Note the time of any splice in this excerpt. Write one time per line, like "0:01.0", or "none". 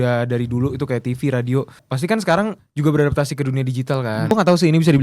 0:01.8
0:02.6
0:04.3